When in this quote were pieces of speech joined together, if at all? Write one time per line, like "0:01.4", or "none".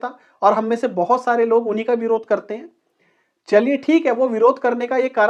none